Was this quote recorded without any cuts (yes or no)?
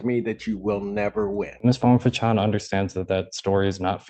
no